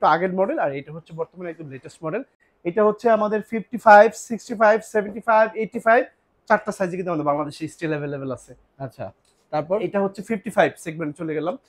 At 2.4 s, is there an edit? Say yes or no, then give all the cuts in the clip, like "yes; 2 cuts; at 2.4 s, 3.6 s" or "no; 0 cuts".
no; 0 cuts